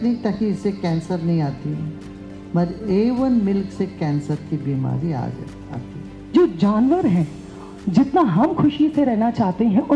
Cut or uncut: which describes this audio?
cut